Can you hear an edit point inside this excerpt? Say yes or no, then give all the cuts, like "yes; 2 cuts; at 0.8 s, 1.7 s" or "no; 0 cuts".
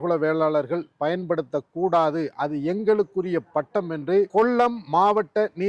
no; 0 cuts